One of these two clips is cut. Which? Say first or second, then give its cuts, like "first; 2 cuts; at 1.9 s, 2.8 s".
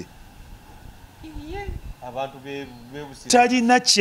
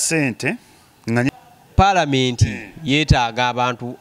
second; 1 cut; at 1.3 s